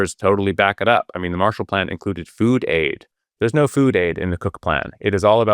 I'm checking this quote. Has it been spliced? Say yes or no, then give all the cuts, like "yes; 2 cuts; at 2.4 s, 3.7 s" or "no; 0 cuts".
no; 0 cuts